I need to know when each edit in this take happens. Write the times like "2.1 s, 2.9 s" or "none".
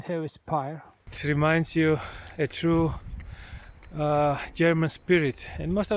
1.1 s